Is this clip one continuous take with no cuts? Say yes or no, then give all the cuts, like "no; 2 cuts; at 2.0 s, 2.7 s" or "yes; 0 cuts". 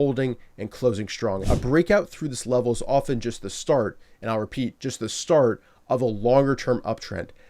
no; 1 cut; at 1.4 s